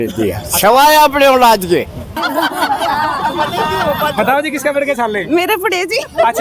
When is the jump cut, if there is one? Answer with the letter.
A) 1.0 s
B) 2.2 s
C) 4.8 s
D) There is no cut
B